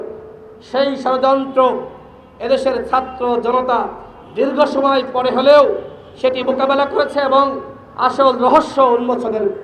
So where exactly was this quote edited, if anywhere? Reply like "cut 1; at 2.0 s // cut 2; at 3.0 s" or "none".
none